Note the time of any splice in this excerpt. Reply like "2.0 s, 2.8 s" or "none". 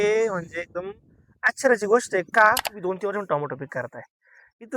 2.7 s